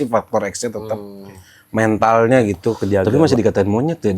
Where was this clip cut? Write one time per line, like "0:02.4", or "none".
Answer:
0:03.0